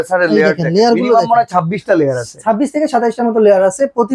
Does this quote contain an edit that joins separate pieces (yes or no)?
no